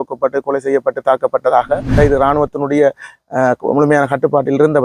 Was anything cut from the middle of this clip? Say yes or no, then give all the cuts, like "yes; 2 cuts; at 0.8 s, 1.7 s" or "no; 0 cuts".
yes; 1 cut; at 1.9 s